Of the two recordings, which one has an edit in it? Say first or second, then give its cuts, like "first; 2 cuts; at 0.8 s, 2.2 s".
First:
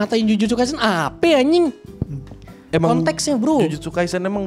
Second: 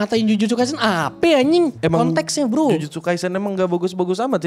second; 1 cut; at 1.8 s